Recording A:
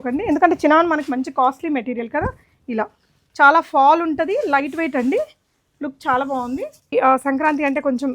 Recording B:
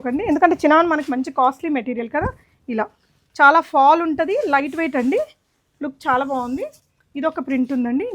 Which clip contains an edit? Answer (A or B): A